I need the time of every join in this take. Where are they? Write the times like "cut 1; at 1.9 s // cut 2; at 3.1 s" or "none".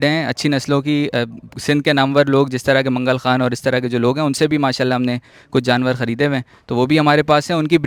none